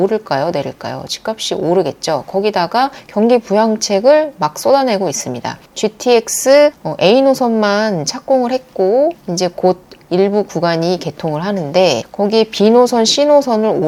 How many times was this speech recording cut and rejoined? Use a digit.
0